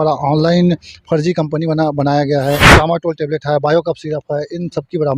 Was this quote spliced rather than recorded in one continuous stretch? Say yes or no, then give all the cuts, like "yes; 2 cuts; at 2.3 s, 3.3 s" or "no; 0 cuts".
yes; 1 cut; at 2.7 s